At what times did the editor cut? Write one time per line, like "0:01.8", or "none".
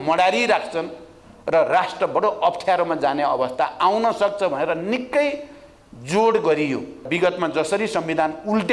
0:07.1